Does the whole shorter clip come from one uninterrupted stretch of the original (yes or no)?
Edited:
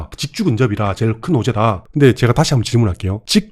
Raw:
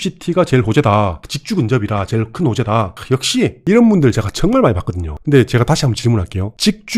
no